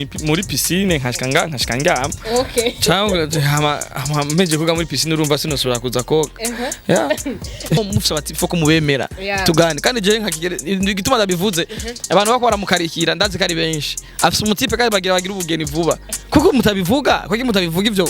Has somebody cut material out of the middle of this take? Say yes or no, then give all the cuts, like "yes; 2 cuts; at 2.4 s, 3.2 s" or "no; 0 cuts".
yes; 1 cut; at 7.8 s